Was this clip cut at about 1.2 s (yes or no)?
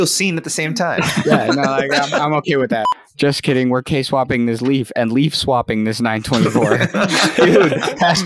no